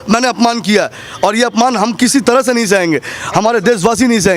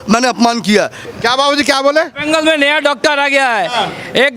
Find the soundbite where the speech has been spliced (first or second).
second